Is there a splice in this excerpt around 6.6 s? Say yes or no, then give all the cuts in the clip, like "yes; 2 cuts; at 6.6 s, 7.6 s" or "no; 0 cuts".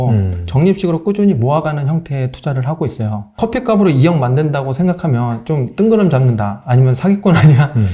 no; 1 cut; at 3.4 s